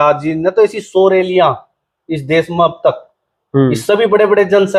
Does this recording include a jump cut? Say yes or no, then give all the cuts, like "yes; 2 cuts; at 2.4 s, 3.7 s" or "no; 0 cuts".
no; 0 cuts